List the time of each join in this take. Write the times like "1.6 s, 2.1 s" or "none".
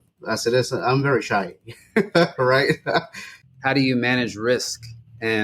3.4 s